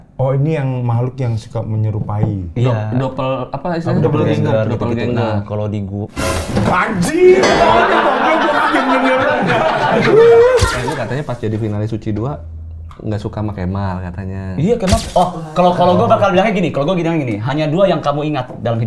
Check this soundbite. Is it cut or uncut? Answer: cut